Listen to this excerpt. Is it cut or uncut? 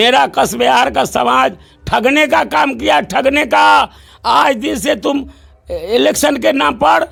uncut